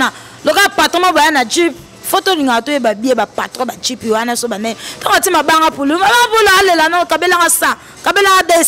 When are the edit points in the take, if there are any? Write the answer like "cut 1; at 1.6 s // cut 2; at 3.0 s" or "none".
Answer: none